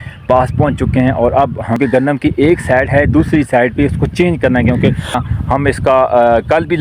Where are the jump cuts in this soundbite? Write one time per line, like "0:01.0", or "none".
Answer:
0:05.2